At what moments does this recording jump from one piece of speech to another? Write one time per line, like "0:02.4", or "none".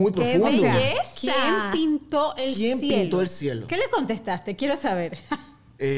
none